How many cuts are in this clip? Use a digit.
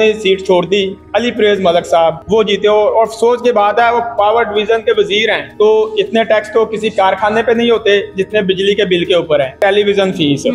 4